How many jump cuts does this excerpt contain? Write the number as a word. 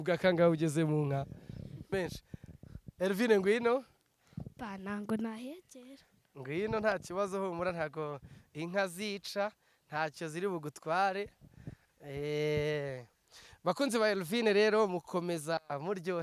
one